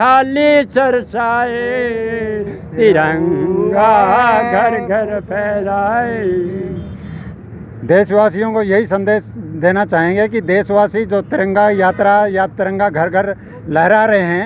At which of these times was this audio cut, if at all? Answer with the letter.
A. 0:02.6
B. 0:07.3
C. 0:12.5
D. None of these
B